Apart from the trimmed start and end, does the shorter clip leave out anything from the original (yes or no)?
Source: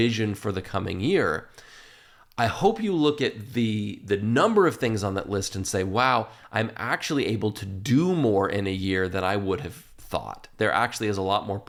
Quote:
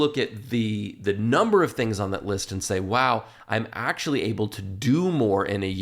no